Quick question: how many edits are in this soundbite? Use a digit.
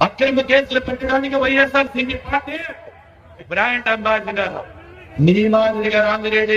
1